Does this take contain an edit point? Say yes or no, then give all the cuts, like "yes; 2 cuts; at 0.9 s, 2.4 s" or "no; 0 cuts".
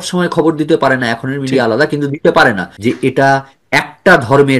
yes; 1 cut; at 2.7 s